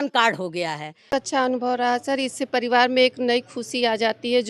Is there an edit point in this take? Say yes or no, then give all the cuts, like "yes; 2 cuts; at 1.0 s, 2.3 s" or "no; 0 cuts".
yes; 1 cut; at 1.1 s